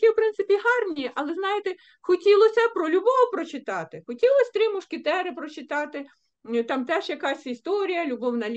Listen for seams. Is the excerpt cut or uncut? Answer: uncut